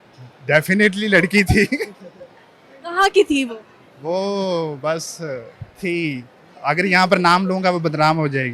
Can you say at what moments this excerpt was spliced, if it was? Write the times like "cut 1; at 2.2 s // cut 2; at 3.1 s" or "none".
none